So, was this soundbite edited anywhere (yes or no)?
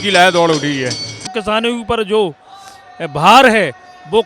yes